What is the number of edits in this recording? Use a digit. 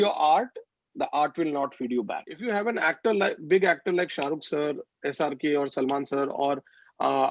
1